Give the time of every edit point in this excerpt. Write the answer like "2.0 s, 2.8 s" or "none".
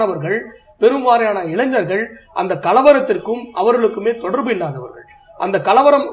none